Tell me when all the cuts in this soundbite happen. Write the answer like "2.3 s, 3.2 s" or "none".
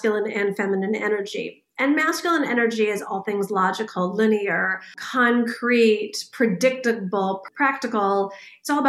5.0 s, 7.5 s